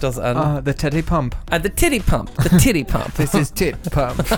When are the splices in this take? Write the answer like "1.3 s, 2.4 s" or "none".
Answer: none